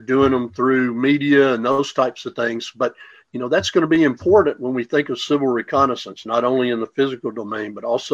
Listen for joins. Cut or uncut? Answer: uncut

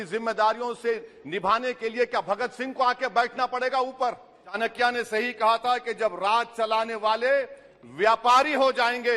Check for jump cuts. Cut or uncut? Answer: cut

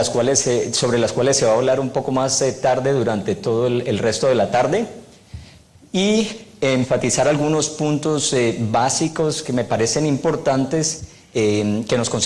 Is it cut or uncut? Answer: cut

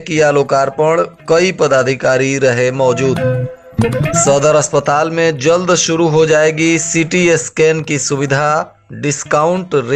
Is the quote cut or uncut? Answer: cut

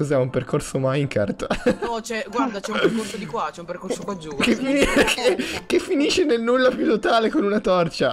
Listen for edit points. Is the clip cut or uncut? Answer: uncut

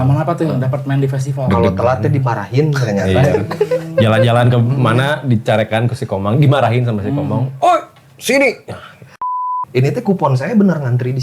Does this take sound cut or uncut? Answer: cut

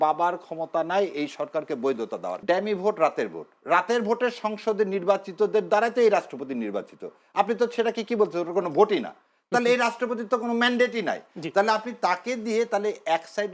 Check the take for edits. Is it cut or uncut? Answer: cut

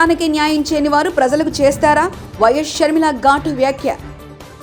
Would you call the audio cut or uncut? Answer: uncut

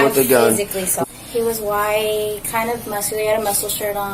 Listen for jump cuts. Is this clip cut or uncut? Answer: cut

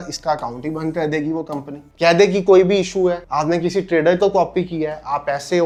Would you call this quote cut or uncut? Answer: uncut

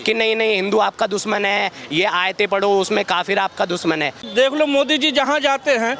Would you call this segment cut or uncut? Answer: cut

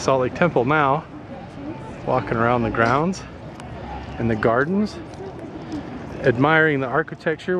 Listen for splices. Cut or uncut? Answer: uncut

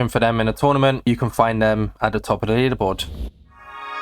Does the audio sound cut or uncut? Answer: cut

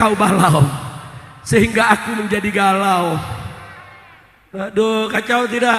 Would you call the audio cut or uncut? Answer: uncut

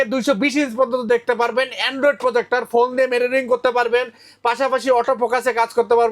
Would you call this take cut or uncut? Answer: uncut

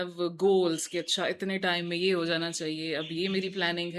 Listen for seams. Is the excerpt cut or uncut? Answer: uncut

